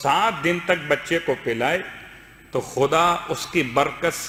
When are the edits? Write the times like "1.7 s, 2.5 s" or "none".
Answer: none